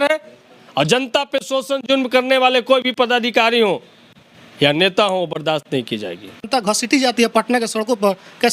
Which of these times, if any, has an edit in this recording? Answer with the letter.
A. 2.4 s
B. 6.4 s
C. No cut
B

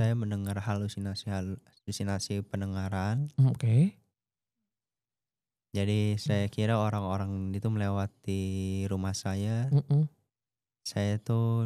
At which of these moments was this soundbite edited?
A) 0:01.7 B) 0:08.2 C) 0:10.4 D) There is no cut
D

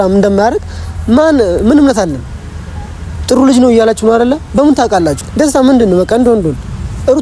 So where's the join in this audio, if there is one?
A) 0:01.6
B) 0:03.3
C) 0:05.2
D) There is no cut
C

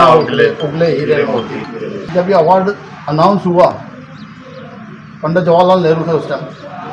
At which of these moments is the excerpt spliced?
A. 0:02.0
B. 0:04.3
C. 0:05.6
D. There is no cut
A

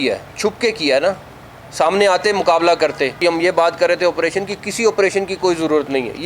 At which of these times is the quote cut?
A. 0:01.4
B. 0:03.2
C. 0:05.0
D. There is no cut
B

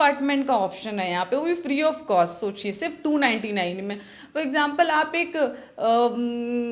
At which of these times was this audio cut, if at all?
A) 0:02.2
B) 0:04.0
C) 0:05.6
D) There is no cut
D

